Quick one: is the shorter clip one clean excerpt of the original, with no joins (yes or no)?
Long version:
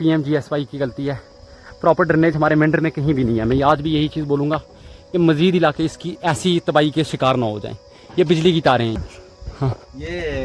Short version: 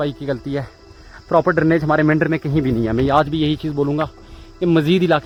yes